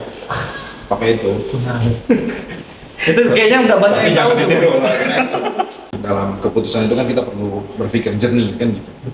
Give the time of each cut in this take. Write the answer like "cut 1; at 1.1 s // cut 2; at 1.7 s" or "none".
cut 1; at 5.9 s

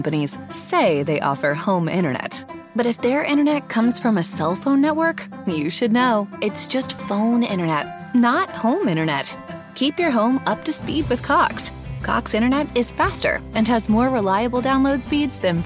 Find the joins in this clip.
none

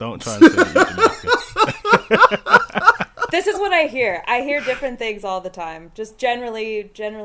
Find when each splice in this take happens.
none

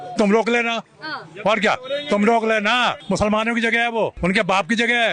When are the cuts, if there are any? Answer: cut 1; at 3.0 s // cut 2; at 4.1 s

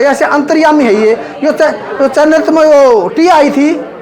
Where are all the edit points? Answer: none

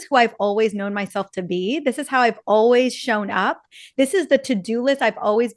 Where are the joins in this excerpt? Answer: none

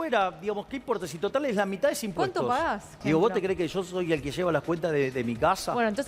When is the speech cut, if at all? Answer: cut 1; at 2.9 s

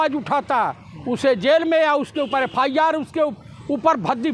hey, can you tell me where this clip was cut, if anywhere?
none

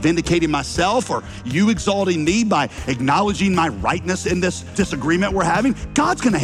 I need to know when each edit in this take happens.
cut 1; at 4.7 s

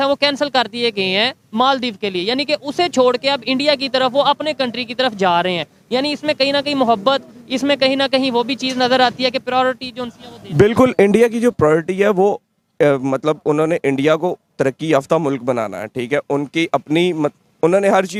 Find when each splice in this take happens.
none

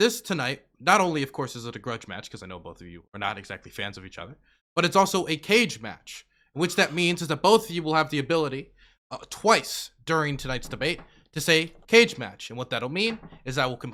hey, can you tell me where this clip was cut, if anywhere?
none

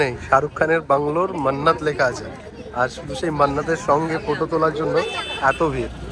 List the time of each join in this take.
none

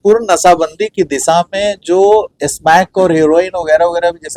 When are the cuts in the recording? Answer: none

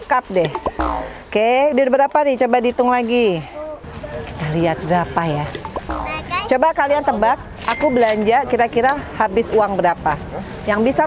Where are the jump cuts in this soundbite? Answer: cut 1; at 3.8 s

